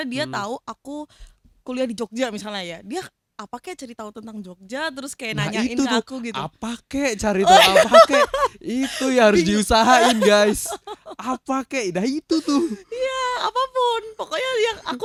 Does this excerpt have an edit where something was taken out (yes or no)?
no